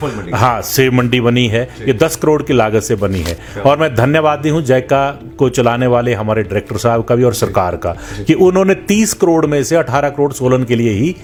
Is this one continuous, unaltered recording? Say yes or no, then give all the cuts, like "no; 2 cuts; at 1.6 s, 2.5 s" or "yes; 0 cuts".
yes; 0 cuts